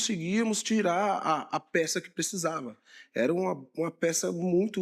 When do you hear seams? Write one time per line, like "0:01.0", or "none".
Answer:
none